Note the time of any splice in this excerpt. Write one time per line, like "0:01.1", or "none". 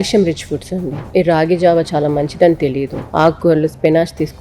0:01.0
0:02.9